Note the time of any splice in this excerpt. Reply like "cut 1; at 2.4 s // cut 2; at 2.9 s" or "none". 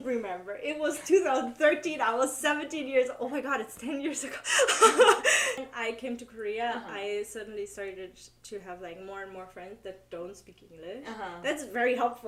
cut 1; at 5.7 s